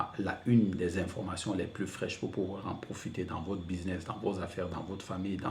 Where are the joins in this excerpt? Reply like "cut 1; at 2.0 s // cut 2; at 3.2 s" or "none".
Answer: none